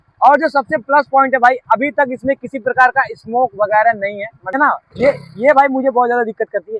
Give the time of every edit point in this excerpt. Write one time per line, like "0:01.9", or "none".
0:04.6

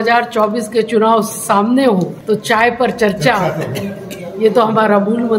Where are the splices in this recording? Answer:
0:02.2

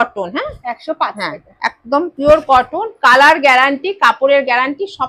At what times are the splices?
none

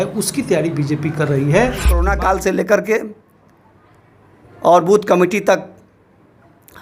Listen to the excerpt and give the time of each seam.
0:02.0

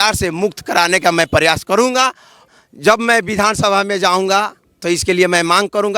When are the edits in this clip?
0:02.4

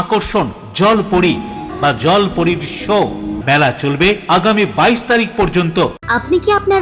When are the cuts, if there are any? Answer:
0:01.7
0:03.4
0:06.0

